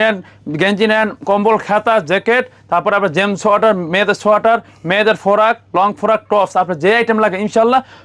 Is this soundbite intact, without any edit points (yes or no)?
yes